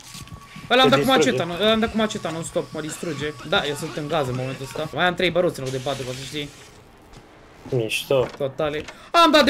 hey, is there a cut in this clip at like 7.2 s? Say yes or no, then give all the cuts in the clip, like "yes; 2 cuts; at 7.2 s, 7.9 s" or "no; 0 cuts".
no; 2 cuts; at 3.4 s, 4.9 s